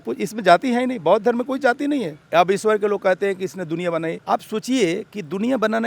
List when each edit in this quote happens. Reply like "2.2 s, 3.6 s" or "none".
2.2 s, 4.2 s